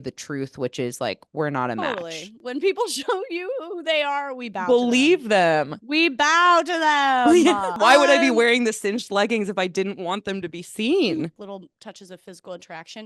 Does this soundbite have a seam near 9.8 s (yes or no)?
no